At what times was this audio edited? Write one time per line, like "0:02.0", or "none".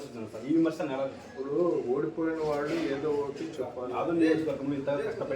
0:01.2
0:03.8